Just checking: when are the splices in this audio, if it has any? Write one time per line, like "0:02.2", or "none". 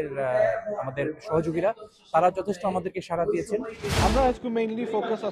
0:03.9